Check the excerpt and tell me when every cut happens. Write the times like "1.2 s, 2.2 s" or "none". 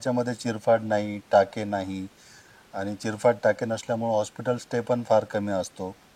none